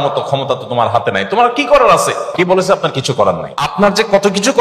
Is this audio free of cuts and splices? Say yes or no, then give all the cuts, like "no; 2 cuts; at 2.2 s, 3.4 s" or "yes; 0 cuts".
no; 2 cuts; at 2.3 s, 3.7 s